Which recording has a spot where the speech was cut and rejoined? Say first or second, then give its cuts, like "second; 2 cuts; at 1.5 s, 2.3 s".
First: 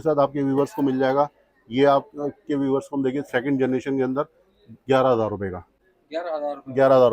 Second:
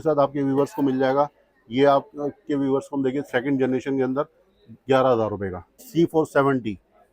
second; 1 cut; at 5.9 s